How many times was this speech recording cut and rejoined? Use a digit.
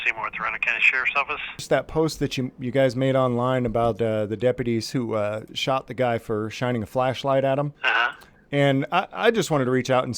2